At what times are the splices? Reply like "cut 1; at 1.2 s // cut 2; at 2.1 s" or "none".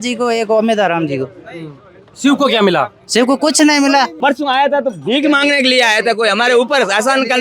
cut 1; at 4.1 s